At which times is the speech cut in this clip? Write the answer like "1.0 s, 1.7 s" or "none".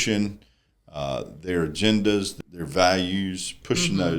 2.4 s

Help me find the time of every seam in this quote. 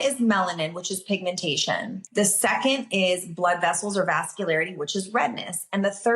2.0 s

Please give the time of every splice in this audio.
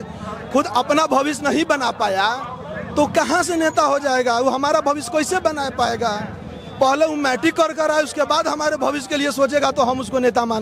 none

